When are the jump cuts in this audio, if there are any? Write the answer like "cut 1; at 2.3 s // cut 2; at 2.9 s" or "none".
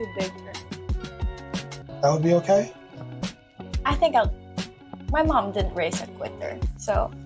cut 1; at 1.8 s